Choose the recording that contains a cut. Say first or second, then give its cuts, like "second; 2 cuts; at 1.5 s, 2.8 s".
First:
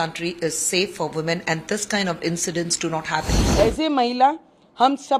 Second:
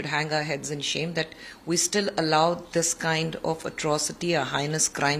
first; 1 cut; at 3.3 s